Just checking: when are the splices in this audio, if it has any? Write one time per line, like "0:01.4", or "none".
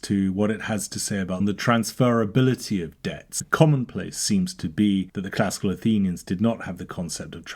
0:01.4
0:03.4